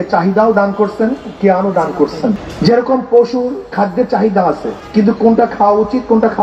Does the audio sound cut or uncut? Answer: cut